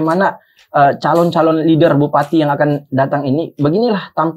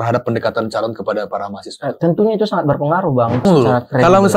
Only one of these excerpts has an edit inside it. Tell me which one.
second; 1 cut; at 3.4 s

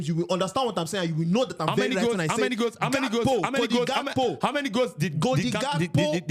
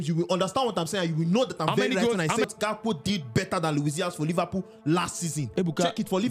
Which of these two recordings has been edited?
second; 2 cuts; at 2.5 s, 5.4 s

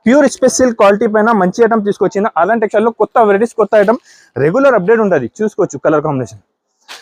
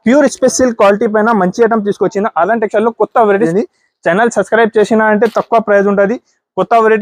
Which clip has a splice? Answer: second; 1 cut; at 3.5 s

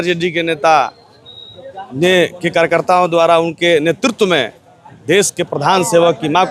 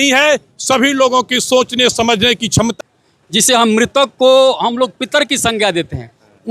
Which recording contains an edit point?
second; 1 cut; at 2.8 s

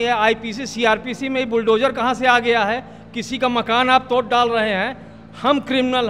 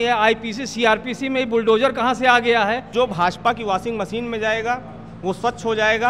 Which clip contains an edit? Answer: second; 1 cut; at 2.9 s

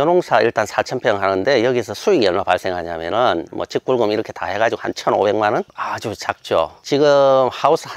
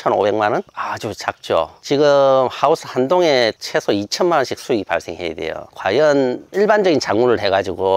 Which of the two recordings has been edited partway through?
second; 1 cut; at 5.7 s

